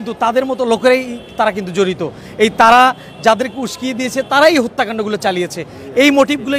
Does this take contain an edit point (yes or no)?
no